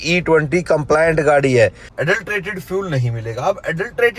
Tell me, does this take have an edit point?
yes; 1 cut; at 1.9 s

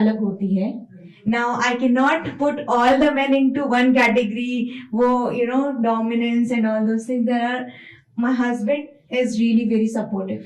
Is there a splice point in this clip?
no; 0 cuts

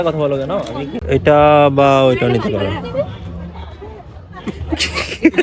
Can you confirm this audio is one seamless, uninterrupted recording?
no; 1 cut; at 0.9 s

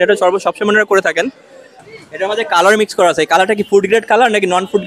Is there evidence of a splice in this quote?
yes; 1 cut; at 1.8 s

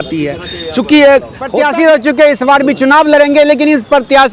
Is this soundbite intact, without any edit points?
no; 1 cut; at 1.4 s

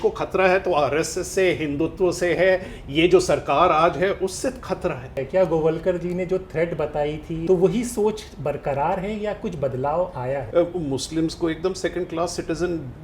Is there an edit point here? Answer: yes; 3 cuts; at 5.1 s, 7.4 s, 10.4 s

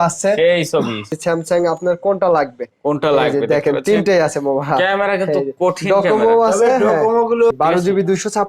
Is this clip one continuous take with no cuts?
no; 2 cuts; at 1.1 s, 7.5 s

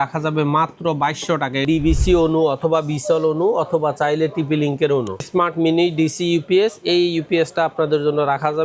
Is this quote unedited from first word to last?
no; 2 cuts; at 1.6 s, 5.3 s

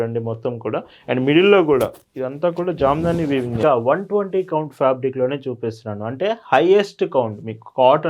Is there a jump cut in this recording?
yes; 1 cut; at 3.6 s

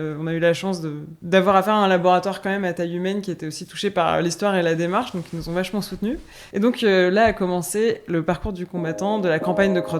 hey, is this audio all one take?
no; 2 cuts; at 1.1 s, 6.4 s

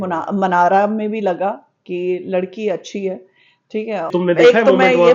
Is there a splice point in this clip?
yes; 1 cut; at 4.1 s

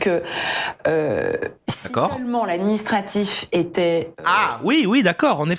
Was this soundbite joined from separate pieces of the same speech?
no; 0 cuts

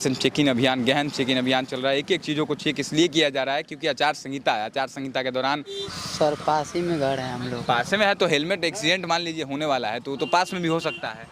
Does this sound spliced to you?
yes; 1 cut; at 5.9 s

